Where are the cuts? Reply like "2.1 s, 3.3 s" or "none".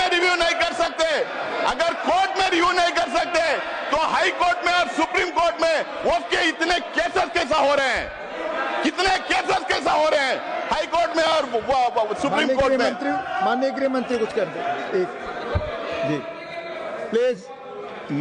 none